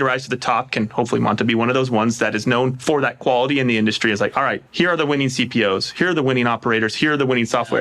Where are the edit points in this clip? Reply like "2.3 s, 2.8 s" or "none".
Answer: 2.8 s